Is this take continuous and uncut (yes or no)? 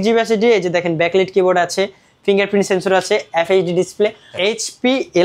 no